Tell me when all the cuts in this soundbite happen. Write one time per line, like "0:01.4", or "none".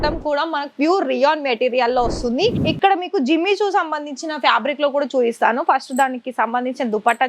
0:02.6